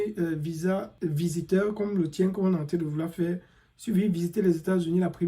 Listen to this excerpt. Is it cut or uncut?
cut